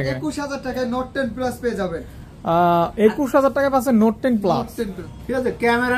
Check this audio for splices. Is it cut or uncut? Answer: cut